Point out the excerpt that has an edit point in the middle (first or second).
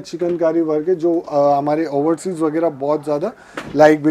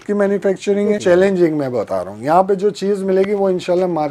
second